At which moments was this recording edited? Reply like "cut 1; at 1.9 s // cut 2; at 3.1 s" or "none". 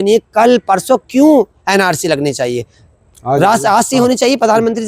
none